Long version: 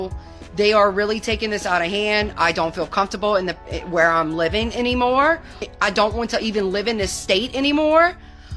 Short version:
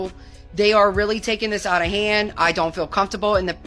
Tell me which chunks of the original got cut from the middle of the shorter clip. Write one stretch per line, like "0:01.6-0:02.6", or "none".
none